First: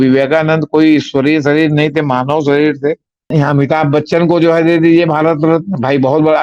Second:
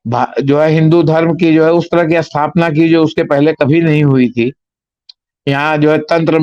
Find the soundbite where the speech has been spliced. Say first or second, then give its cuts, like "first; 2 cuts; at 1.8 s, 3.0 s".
first; 1 cut; at 3.2 s